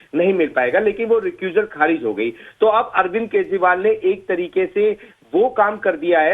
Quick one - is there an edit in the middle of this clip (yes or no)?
yes